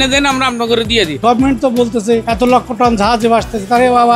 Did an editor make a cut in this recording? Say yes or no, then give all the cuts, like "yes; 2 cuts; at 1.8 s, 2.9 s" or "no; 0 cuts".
yes; 2 cuts; at 1.2 s, 2.3 s